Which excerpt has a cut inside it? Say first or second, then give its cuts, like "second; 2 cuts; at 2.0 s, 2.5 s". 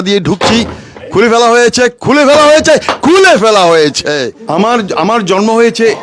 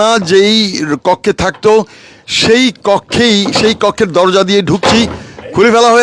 first; 1 cut; at 4.4 s